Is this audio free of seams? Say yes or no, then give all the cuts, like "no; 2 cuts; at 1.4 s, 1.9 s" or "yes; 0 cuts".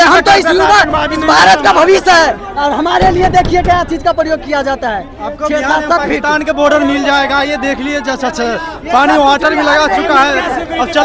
yes; 0 cuts